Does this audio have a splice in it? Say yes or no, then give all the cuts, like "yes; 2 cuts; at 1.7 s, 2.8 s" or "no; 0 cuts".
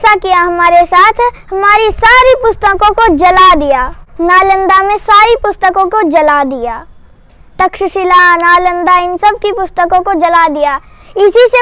no; 0 cuts